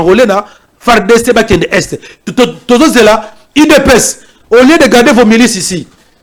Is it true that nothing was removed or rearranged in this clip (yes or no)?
yes